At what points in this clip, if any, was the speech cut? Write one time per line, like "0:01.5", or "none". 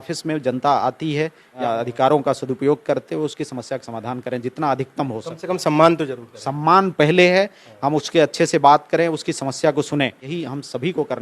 0:01.5
0:10.3